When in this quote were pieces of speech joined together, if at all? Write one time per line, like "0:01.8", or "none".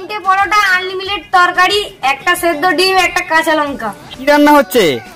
0:04.1